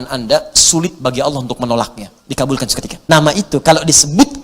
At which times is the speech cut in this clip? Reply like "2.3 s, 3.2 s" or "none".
2.9 s